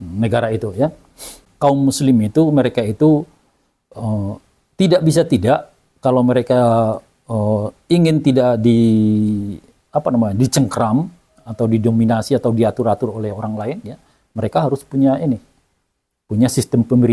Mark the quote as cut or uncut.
cut